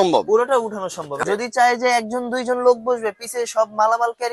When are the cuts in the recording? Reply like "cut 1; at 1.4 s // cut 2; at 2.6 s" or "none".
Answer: cut 1; at 1.2 s